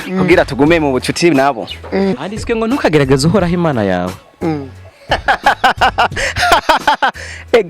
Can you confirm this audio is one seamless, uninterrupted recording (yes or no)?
no